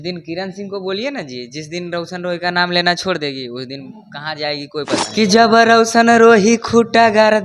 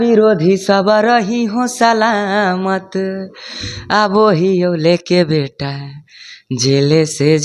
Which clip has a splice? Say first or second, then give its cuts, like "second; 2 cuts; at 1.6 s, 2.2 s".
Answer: first; 1 cut; at 5.1 s